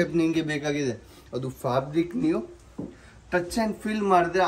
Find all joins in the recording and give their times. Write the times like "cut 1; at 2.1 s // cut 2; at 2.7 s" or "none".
none